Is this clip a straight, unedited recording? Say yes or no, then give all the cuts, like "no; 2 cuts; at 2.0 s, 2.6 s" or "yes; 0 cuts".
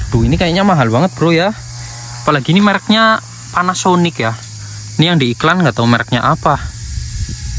yes; 0 cuts